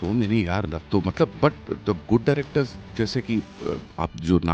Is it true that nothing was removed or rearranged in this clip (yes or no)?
yes